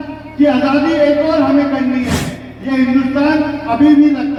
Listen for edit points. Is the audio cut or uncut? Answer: uncut